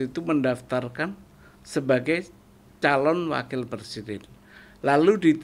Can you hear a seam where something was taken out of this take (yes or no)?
no